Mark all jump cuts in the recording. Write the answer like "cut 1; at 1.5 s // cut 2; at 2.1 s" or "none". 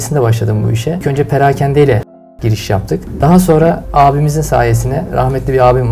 cut 1; at 1.0 s // cut 2; at 2.7 s // cut 3; at 3.8 s